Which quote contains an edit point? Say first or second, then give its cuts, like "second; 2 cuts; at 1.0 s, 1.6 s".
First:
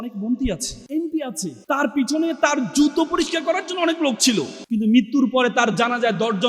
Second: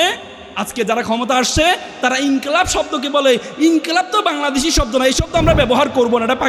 first; 2 cuts; at 1.2 s, 4.6 s